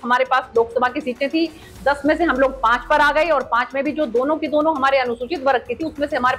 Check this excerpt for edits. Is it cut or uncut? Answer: uncut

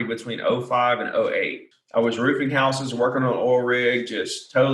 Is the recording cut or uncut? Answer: cut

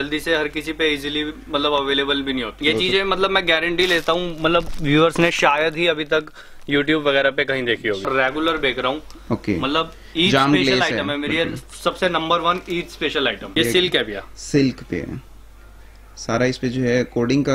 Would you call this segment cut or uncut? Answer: cut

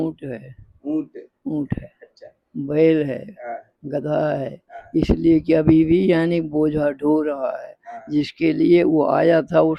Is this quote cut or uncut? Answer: uncut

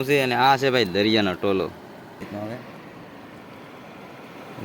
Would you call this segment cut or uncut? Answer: cut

